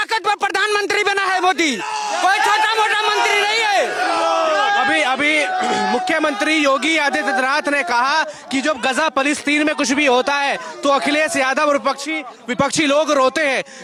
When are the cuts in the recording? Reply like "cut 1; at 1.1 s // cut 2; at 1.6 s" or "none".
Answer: none

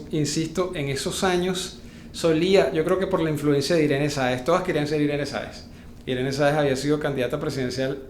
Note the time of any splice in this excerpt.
none

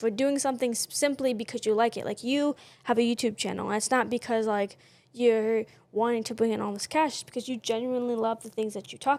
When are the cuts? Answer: none

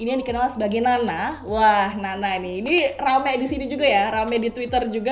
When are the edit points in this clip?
none

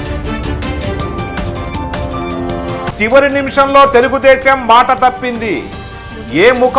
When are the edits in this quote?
cut 1; at 2.8 s

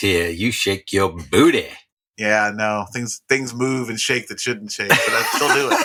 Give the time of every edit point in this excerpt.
none

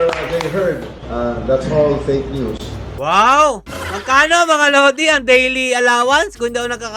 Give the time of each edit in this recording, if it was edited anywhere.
none

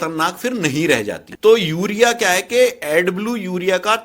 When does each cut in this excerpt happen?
cut 1; at 1.3 s

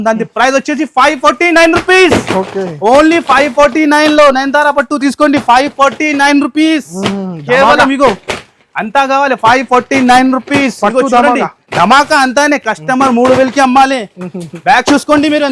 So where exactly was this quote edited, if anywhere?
none

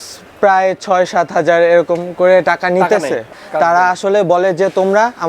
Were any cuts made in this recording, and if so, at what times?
cut 1; at 3.3 s

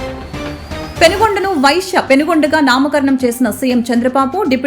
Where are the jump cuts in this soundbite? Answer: cut 1; at 0.9 s

